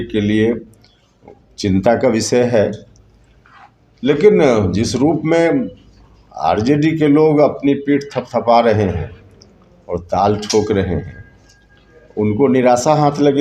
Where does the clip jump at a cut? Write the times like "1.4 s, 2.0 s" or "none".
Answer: none